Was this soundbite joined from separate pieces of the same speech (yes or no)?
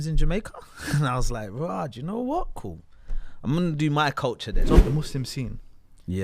yes